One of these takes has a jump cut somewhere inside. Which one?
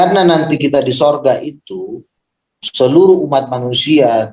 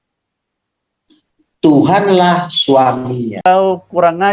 second; 1 cut; at 3.3 s

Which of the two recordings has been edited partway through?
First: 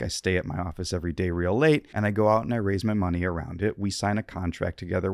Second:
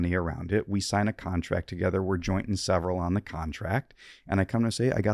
first; 1 cut; at 1.9 s

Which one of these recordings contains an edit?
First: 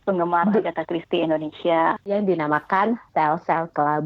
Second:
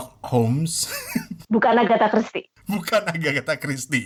first; 2 cuts; at 2.1 s, 3.0 s

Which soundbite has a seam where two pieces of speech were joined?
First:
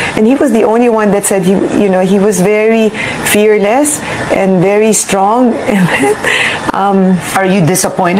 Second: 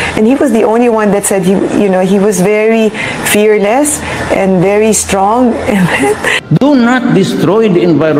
second; 1 cut; at 6.3 s

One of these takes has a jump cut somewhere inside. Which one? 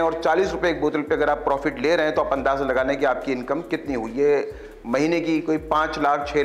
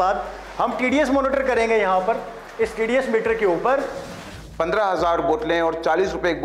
second; 1 cut; at 4.2 s

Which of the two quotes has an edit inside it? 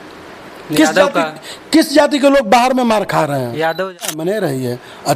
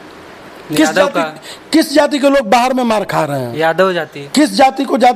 first; 1 cut; at 4.2 s

